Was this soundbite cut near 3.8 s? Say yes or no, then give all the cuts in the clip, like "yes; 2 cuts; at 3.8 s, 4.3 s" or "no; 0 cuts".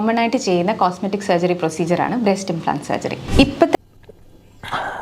yes; 1 cut; at 3.8 s